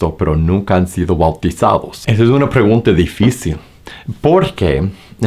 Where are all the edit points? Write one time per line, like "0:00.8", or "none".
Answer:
none

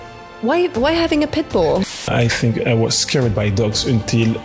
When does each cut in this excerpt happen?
0:02.1

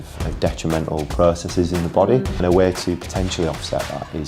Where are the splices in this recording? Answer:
0:02.4

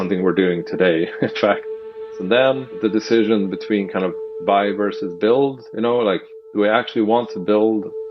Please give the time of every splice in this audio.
0:01.8
0:02.8

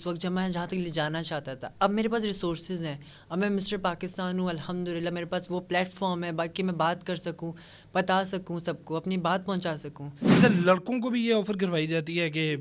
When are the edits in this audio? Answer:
0:10.2

